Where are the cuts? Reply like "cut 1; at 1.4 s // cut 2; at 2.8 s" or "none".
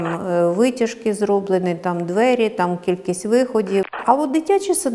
cut 1; at 3.9 s